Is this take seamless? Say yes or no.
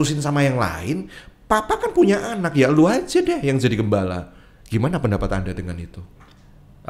yes